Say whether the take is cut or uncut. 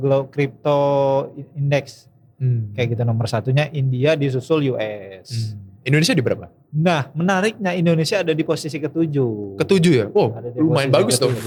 uncut